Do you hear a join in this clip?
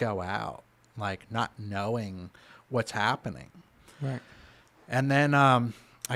no; 0 cuts

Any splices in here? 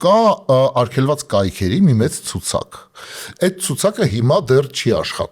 no; 0 cuts

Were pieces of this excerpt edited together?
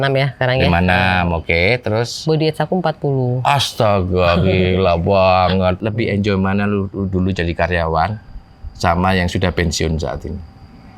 yes; 1 cut; at 5.8 s

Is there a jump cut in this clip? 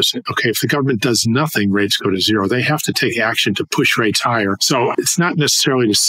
yes; 1 cut; at 4.6 s

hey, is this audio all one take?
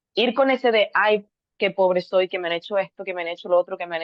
yes; 0 cuts

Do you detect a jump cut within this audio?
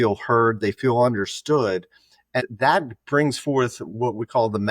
yes; 1 cut; at 2.4 s

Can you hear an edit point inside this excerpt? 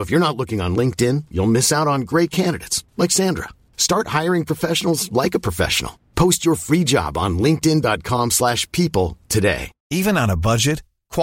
yes; 1 cut; at 9.7 s

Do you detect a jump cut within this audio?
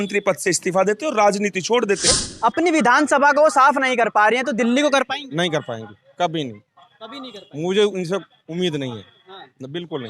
yes; 1 cut; at 2.1 s

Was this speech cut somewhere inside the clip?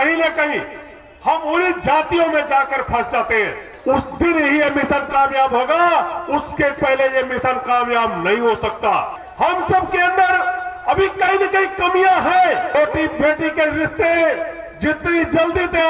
yes; 3 cuts; at 3.7 s, 9.2 s, 12.7 s

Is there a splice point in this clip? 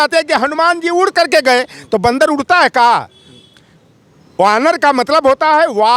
no; 0 cuts

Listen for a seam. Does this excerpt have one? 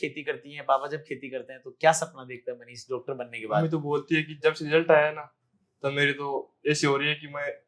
no; 0 cuts

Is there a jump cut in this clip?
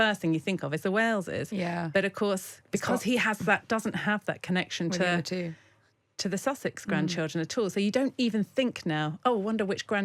no; 0 cuts

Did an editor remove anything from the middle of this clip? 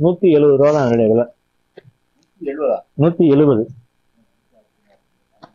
no; 0 cuts

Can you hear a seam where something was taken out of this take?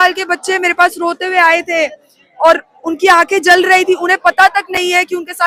no; 0 cuts

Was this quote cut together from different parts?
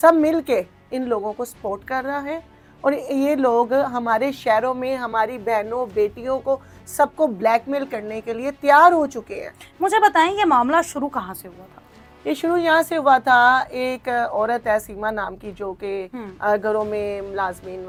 no; 0 cuts

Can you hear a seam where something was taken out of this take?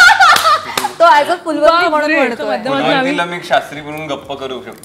yes; 1 cut; at 2.6 s

